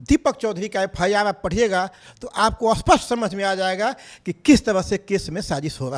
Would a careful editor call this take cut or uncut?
uncut